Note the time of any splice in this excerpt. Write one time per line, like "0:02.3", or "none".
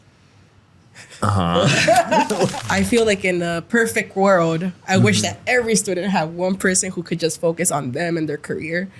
0:02.6